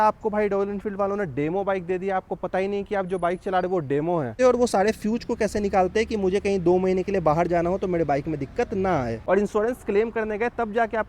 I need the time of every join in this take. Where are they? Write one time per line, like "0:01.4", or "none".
0:04.3
0:09.2